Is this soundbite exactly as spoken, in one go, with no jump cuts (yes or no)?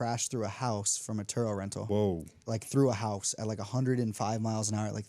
no